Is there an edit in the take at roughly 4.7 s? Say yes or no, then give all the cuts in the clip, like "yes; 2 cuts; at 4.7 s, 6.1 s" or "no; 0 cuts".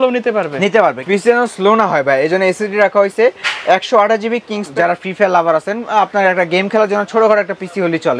yes; 2 cuts; at 1.0 s, 4.7 s